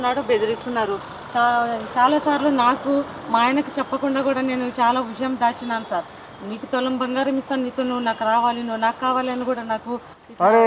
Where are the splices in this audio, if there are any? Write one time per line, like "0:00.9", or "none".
none